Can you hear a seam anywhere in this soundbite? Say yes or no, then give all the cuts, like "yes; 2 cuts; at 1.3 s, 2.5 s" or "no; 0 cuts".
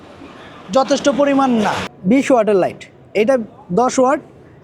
yes; 1 cut; at 1.9 s